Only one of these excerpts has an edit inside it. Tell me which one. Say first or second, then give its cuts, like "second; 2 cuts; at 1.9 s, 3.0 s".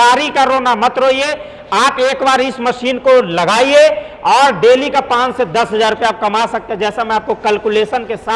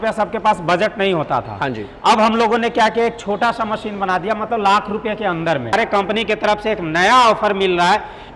second; 1 cut; at 5.7 s